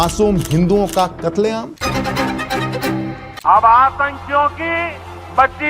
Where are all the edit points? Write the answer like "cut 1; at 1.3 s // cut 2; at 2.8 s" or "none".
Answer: cut 1; at 1.7 s // cut 2; at 3.3 s